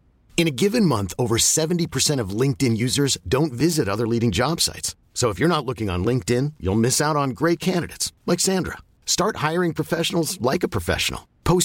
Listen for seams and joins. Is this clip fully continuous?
yes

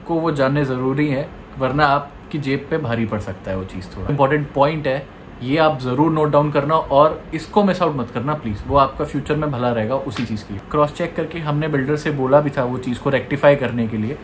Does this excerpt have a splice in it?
yes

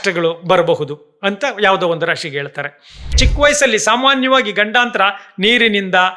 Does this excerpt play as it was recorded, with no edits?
no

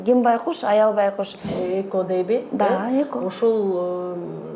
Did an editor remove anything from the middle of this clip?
yes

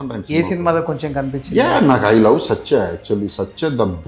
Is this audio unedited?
yes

